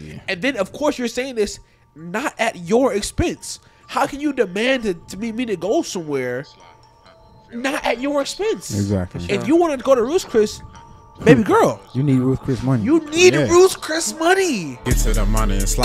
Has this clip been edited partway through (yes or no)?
yes